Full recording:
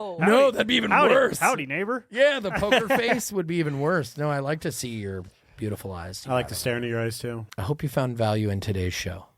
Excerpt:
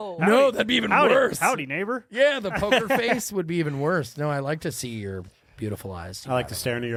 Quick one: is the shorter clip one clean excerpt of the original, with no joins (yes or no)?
yes